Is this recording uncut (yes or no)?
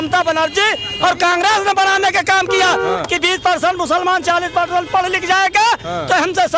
yes